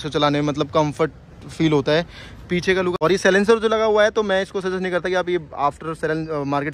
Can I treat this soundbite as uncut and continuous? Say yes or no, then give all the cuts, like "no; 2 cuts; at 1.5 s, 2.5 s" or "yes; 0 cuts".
no; 1 cut; at 2.9 s